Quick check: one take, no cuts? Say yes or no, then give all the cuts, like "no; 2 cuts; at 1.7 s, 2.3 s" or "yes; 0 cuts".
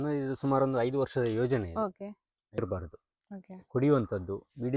no; 1 cut; at 2.6 s